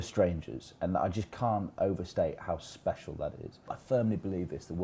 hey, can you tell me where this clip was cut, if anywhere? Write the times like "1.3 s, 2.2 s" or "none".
3.8 s